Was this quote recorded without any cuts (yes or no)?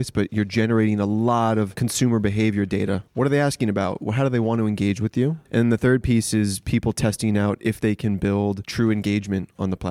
no